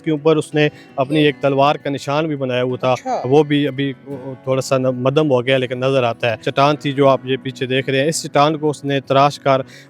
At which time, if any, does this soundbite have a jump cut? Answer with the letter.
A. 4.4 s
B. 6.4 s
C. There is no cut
B